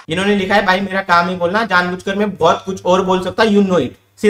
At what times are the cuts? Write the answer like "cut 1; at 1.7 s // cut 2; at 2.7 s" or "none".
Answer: none

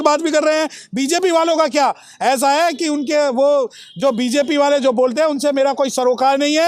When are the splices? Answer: none

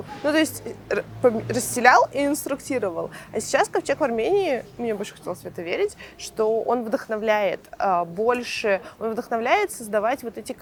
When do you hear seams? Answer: none

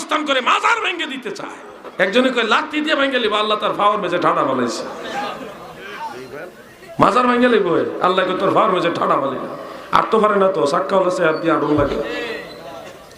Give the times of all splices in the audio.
cut 1; at 1.8 s

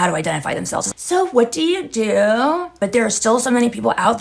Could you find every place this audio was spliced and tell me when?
cut 1; at 2.7 s

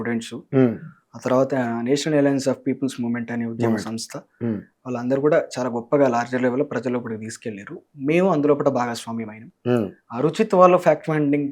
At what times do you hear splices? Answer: none

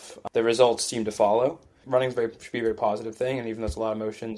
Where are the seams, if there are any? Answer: cut 1; at 1.8 s

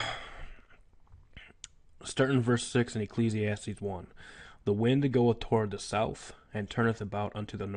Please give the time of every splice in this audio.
none

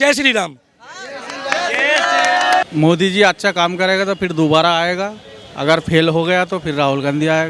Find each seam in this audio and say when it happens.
cut 1; at 2.6 s

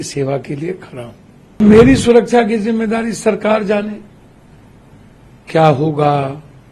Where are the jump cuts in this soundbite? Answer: cut 1; at 1.6 s

